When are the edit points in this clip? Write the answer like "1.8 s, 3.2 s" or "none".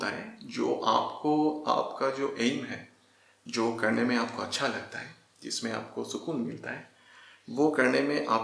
none